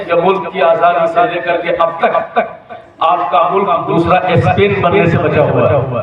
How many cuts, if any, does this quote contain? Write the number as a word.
zero